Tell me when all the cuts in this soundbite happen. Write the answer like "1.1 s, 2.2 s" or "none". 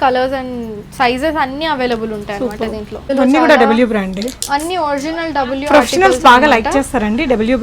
3.1 s

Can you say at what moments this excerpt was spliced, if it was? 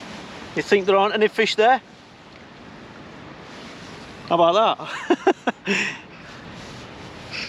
6.4 s

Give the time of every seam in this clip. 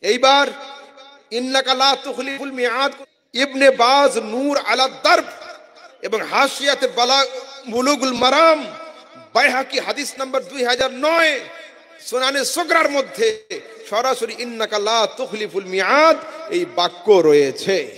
3.0 s

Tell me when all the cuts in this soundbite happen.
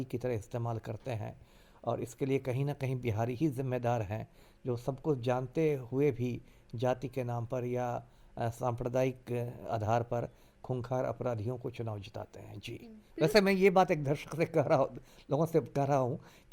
none

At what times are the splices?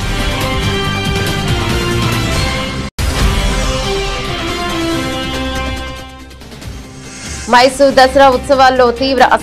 none

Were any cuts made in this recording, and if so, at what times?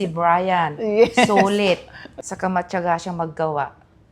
2.2 s

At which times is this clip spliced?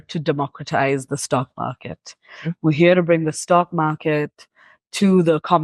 none

